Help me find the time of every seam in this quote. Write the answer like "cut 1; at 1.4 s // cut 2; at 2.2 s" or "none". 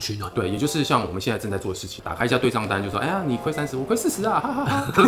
cut 1; at 2.0 s